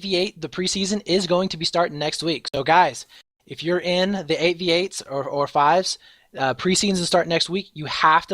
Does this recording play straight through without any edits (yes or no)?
no